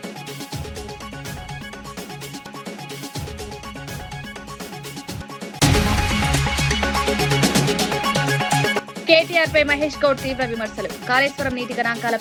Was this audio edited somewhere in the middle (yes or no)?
no